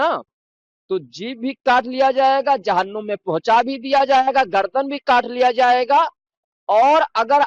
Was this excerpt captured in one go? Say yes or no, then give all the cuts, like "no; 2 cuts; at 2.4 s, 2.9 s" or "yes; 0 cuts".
yes; 0 cuts